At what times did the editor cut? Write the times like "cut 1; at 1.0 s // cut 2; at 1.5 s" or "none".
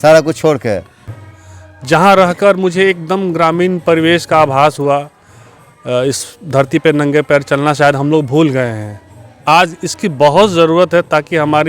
cut 1; at 1.0 s